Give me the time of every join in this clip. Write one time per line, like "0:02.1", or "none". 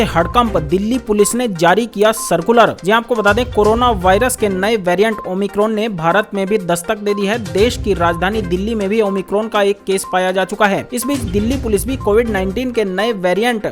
none